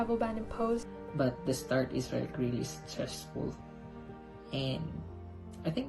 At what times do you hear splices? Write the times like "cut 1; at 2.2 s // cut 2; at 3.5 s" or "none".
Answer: cut 1; at 1.0 s